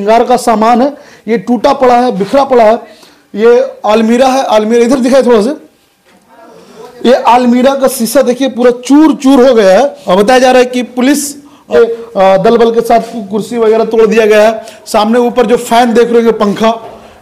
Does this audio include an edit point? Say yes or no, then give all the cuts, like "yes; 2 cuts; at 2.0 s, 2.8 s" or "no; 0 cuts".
yes; 2 cuts; at 10.0 s, 11.7 s